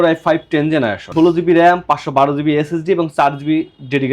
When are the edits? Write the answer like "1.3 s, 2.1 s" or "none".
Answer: 1.0 s